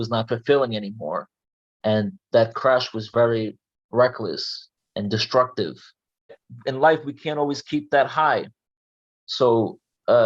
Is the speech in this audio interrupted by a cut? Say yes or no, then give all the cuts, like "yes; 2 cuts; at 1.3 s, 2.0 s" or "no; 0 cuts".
yes; 1 cut; at 6.5 s